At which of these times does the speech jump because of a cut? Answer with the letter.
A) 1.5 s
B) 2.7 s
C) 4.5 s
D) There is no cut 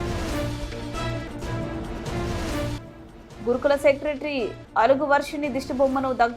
D